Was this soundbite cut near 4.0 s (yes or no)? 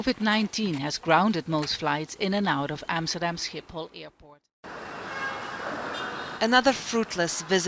yes